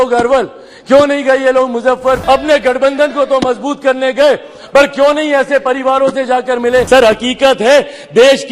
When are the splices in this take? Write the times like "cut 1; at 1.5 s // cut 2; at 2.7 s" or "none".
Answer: cut 1; at 2.2 s // cut 2; at 6.9 s